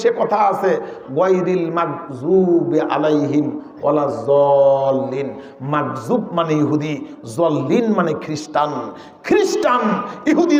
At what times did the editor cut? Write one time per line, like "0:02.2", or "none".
none

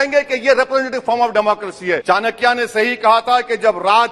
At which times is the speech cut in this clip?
0:02.0

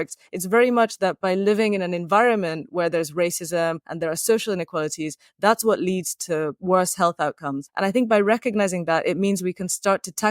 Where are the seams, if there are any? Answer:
0:03.9
0:07.6

